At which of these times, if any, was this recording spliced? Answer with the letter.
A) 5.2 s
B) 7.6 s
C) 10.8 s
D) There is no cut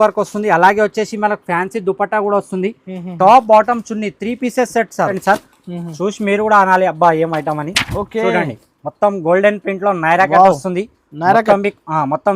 A